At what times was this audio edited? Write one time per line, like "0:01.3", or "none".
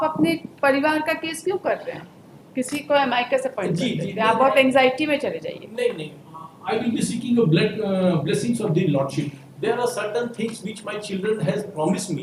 none